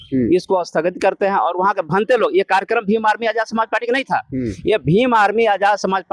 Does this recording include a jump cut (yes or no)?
no